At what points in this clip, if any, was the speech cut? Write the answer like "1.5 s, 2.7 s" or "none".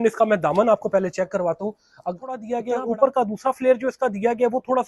2.5 s